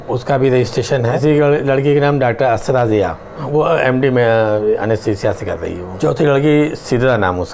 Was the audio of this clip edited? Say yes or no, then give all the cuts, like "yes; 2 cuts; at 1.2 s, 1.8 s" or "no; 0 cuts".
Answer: yes; 3 cuts; at 1.2 s, 3.5 s, 5.8 s